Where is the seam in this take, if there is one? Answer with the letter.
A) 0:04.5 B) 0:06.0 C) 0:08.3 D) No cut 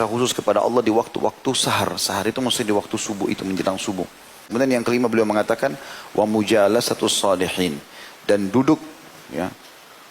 A